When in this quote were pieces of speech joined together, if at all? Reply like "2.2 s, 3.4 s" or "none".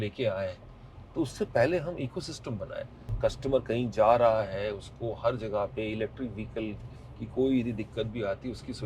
3.0 s